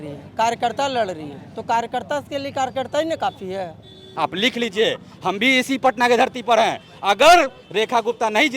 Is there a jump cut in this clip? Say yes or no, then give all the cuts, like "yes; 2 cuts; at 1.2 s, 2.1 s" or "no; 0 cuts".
yes; 1 cut; at 4.1 s